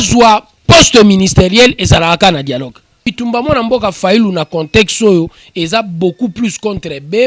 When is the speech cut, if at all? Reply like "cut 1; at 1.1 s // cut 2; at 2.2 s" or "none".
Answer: cut 1; at 3.1 s